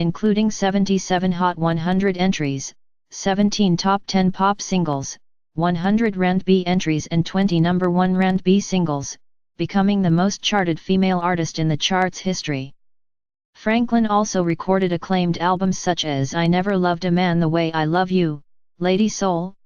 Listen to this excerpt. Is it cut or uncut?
cut